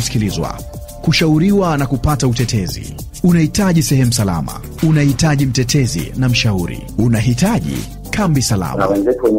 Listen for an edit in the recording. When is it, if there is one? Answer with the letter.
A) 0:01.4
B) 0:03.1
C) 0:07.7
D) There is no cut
D